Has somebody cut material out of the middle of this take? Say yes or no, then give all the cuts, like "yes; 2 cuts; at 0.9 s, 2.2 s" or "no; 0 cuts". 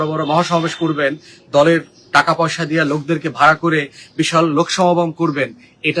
no; 0 cuts